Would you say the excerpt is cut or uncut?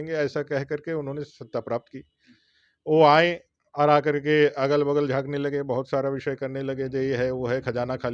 uncut